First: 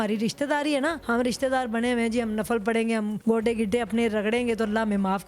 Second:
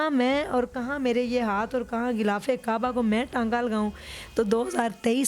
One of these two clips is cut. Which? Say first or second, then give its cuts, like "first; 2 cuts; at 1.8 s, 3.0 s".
first; 2 cuts; at 1.0 s, 3.2 s